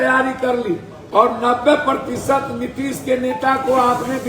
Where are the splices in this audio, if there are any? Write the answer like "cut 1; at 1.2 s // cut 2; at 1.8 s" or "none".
cut 1; at 0.9 s